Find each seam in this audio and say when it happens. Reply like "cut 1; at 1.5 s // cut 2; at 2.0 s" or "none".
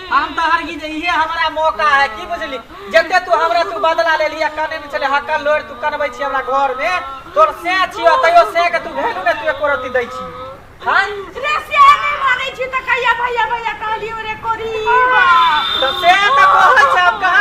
none